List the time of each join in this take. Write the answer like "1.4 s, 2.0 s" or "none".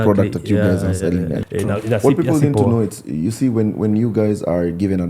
1.4 s